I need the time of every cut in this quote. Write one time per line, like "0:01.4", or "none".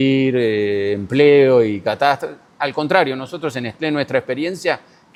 none